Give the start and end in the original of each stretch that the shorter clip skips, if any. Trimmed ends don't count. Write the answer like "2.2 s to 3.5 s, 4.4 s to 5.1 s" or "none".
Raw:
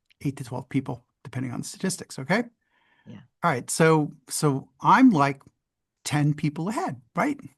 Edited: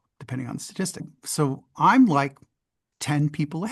2.2 s to 4.2 s